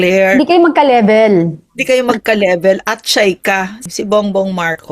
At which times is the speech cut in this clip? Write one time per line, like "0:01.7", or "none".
0:03.8